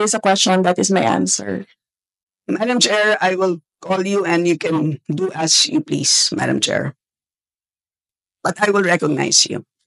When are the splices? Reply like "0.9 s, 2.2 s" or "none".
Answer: none